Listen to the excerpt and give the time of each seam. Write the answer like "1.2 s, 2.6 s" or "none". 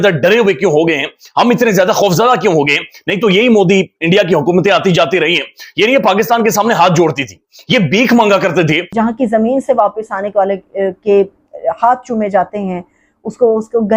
8.9 s